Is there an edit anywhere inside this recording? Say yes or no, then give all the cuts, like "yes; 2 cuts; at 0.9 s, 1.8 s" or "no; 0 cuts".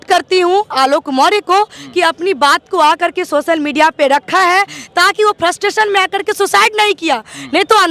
no; 0 cuts